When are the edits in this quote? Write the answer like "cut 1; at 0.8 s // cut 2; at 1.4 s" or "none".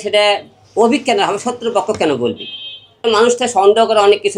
cut 1; at 3.0 s